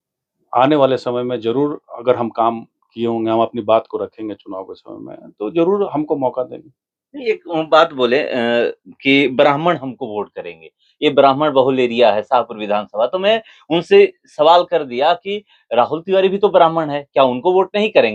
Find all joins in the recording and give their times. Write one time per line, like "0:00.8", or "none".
none